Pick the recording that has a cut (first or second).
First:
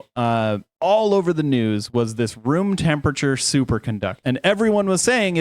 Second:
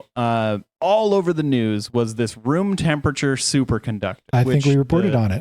first